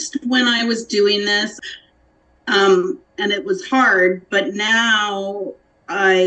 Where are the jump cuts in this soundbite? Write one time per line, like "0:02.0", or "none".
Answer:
0:01.5